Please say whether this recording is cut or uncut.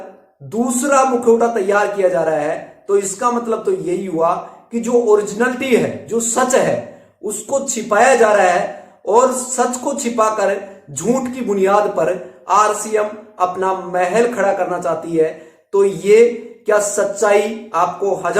uncut